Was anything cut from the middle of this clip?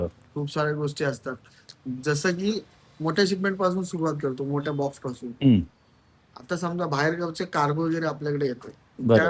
no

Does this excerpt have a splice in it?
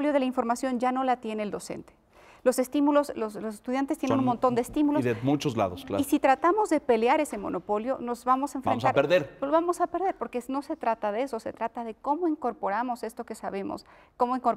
no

